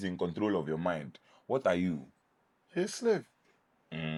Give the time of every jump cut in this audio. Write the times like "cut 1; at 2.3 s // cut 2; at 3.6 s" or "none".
none